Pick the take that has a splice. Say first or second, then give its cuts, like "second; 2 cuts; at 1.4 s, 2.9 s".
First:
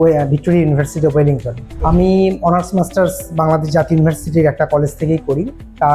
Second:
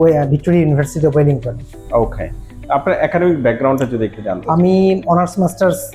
first; 1 cut; at 1.7 s